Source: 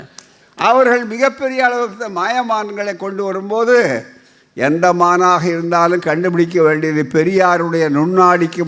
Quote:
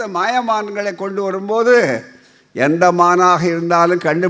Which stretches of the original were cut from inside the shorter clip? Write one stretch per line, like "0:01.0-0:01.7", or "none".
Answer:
none